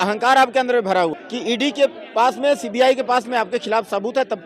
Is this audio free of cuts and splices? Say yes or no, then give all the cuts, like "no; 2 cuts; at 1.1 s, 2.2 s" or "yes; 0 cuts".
no; 1 cut; at 1.1 s